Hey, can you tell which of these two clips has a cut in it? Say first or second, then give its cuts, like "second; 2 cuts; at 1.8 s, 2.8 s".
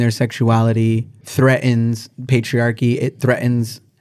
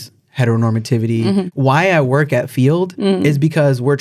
second; 1 cut; at 1.5 s